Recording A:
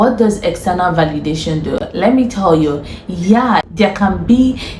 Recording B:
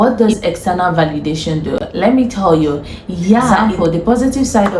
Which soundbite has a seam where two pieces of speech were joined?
B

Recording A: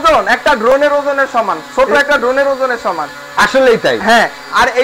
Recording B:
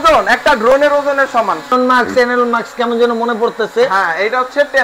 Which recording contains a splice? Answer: B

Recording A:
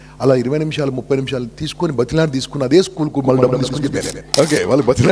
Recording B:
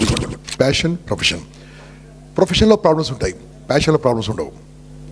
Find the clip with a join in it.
A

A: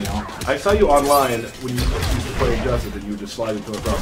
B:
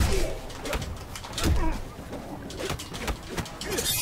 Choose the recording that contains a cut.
A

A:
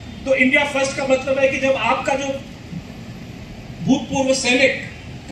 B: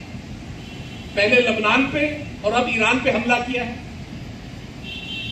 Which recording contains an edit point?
B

